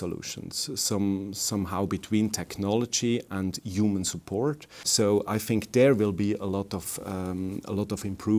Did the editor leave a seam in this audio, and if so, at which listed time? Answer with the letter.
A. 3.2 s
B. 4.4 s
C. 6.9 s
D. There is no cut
D